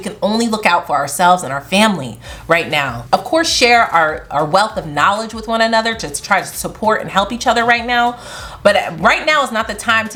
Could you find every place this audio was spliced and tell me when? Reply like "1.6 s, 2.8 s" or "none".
none